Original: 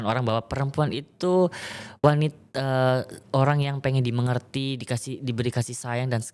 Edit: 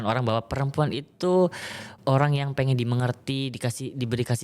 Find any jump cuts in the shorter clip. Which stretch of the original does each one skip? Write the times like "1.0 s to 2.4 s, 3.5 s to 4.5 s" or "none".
1.9 s to 3.1 s